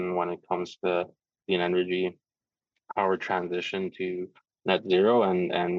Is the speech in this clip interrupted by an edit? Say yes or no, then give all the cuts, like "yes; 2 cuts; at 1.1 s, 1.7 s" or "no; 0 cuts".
yes; 1 cut; at 1.3 s